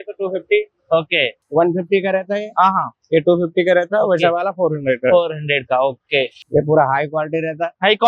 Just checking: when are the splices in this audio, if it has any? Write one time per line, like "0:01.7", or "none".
0:01.4
0:06.4